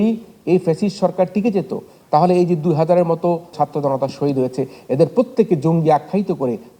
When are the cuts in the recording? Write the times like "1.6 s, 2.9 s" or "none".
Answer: 3.5 s